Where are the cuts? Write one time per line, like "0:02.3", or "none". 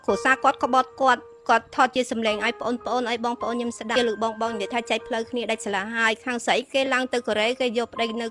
0:04.0